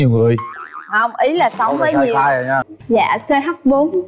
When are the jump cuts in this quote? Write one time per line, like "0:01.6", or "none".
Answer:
0:02.7